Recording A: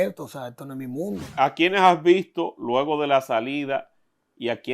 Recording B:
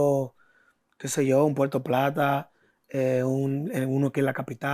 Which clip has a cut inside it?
A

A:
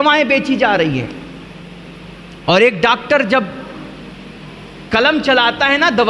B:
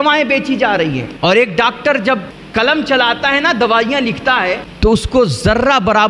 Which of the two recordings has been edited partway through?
B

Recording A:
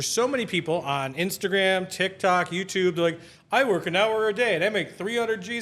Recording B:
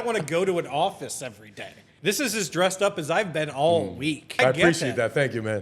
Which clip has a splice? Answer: B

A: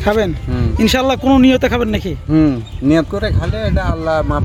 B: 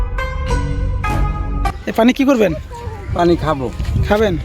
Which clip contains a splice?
B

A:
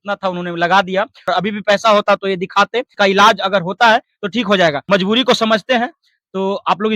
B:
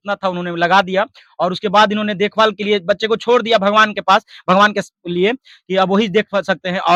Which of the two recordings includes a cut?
A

